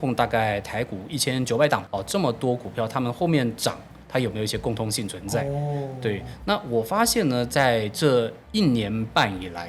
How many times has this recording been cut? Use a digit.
0